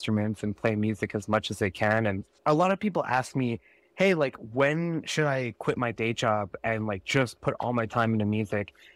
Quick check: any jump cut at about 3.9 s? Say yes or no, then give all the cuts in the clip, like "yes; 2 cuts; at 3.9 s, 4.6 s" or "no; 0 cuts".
no; 1 cut; at 2.3 s